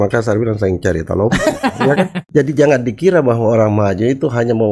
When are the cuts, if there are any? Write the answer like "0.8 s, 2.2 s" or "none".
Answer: 2.2 s